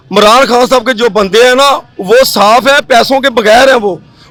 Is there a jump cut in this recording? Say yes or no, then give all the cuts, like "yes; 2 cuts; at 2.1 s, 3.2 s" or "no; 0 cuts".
no; 0 cuts